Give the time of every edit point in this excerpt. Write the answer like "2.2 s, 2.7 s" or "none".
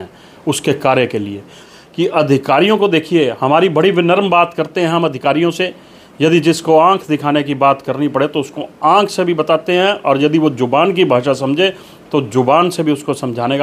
1.6 s